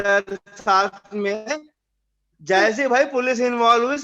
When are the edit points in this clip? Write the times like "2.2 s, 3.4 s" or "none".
none